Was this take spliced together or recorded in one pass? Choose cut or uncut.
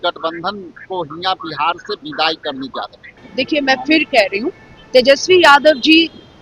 cut